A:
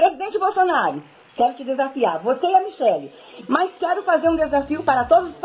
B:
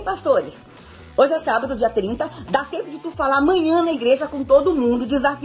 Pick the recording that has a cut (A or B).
A